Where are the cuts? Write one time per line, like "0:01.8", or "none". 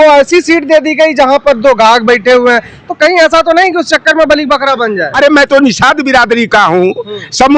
0:05.1